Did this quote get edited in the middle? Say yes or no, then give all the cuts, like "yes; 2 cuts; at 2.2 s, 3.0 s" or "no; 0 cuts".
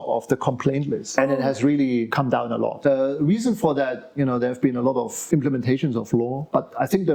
no; 0 cuts